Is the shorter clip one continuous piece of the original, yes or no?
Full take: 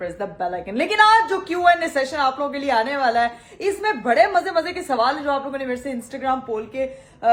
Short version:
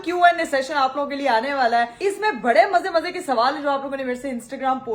no